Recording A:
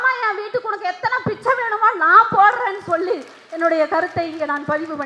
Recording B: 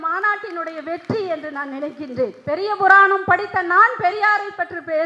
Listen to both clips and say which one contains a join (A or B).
B